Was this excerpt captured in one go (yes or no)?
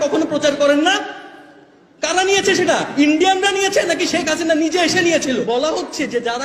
no